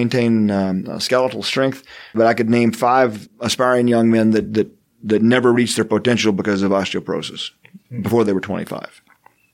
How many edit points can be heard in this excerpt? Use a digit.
2